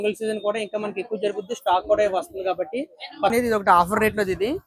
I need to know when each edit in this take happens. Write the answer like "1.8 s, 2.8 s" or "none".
3.3 s